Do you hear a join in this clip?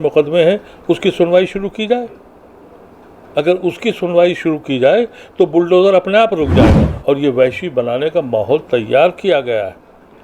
yes; 1 cut; at 6.9 s

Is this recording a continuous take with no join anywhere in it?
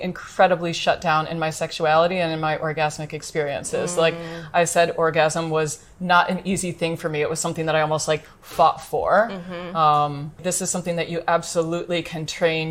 no; 1 cut; at 10.4 s

